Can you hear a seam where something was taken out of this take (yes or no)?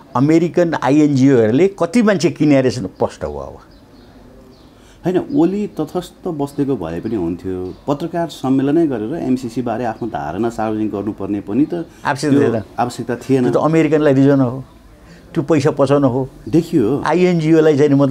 no